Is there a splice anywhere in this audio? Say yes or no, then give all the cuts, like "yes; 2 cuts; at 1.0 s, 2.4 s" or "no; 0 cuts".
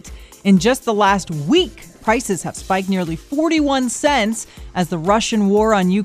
no; 0 cuts